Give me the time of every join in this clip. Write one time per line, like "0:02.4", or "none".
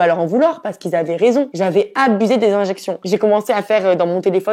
none